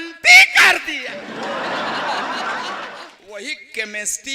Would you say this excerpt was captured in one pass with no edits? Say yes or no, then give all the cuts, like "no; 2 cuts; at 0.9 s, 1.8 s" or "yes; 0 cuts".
no; 2 cuts; at 0.9 s, 3.0 s